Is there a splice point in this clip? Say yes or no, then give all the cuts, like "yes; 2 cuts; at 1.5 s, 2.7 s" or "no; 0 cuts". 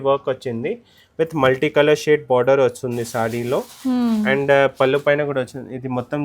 no; 0 cuts